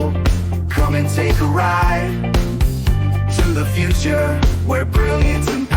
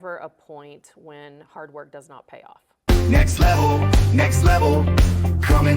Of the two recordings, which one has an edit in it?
second; 1 cut; at 3.0 s

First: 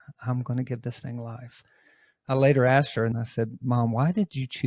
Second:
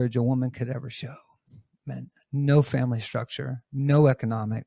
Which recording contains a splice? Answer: first; 1 cut; at 3.1 s

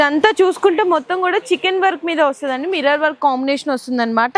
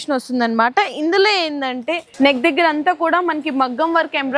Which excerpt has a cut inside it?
second; 1 cut; at 2.0 s

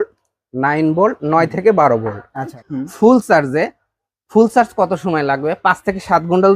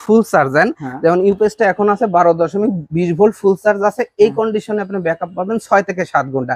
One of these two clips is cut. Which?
first; 1 cut; at 2.7 s

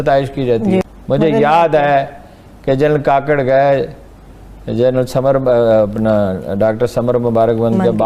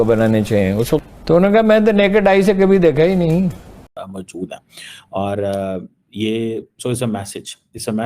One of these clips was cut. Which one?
second; 1 cut; at 4.0 s

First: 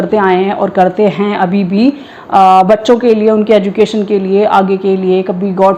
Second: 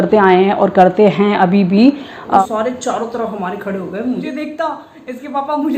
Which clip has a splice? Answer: second; 2 cuts; at 2.4 s, 4.2 s

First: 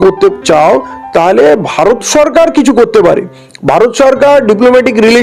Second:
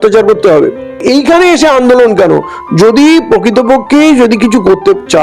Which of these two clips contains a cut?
second; 1 cut; at 1.0 s

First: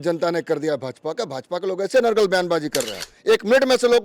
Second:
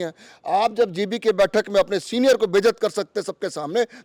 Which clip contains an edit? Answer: first; 1 cut; at 3.1 s

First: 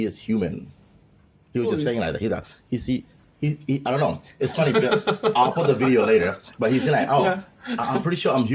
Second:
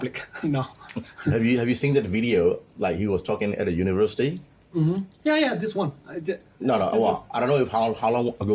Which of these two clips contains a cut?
first; 1 cut; at 7.6 s

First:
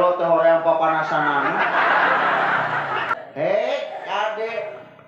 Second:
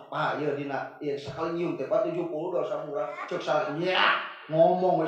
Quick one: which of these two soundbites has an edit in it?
first; 1 cut; at 3.1 s

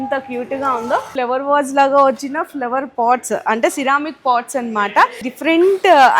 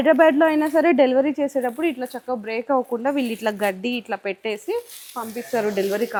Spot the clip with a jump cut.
first; 2 cuts; at 1.1 s, 5.3 s

